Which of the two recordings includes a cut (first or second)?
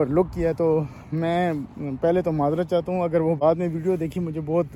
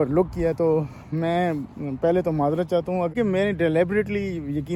first